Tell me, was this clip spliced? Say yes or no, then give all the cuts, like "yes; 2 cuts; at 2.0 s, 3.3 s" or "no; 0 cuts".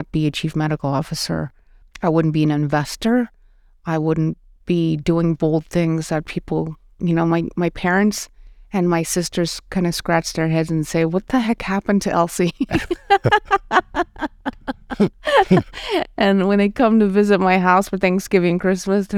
no; 0 cuts